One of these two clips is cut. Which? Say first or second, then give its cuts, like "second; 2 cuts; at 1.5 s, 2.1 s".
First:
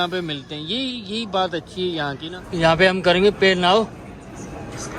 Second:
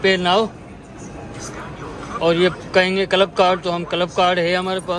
first; 1 cut; at 2.3 s